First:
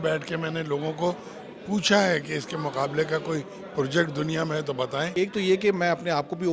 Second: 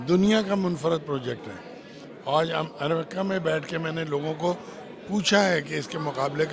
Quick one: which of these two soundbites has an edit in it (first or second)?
first